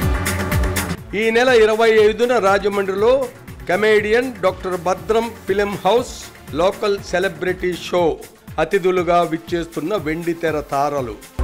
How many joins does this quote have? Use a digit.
1